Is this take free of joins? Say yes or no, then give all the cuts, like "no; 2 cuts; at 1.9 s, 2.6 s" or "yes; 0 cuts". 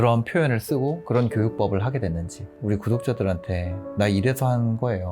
no; 1 cut; at 2.4 s